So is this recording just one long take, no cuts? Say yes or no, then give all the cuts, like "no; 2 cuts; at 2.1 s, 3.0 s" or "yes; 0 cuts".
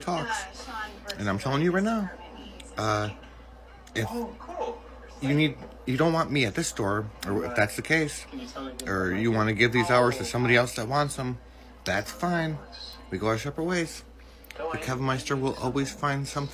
yes; 0 cuts